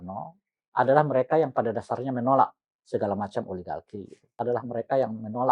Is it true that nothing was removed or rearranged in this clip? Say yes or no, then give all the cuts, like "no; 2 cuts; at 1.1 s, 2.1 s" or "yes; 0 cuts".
no; 1 cut; at 4.4 s